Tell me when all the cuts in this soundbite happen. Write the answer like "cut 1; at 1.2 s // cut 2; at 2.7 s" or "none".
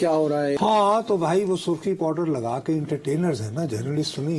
none

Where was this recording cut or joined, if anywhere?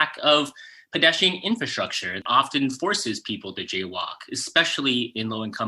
cut 1; at 2.2 s

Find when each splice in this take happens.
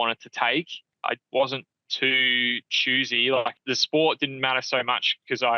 cut 1; at 0.9 s // cut 2; at 3.6 s

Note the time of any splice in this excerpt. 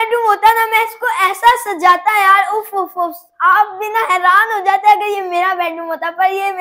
none

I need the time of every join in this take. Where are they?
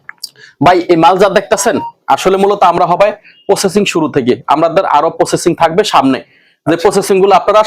none

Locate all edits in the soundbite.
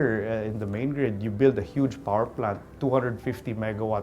cut 1; at 2.7 s

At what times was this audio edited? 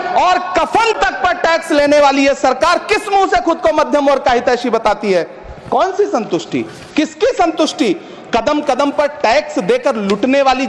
none

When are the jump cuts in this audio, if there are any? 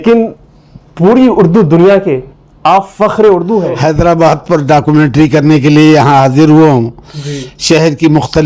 cut 1; at 3.7 s

